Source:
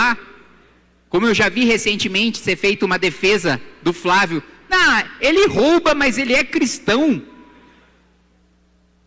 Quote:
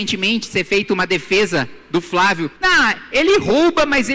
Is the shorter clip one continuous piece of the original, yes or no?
no